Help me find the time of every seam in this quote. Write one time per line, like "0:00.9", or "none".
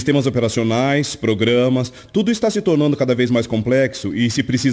0:03.5